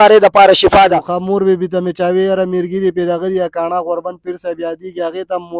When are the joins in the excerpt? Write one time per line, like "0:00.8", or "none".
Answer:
0:01.1